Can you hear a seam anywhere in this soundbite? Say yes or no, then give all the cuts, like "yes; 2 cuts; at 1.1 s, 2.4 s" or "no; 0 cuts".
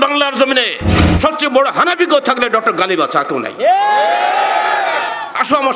no; 0 cuts